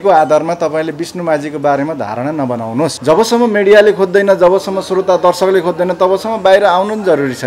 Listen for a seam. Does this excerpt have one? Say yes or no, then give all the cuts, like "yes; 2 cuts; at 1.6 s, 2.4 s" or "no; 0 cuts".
yes; 1 cut; at 3.0 s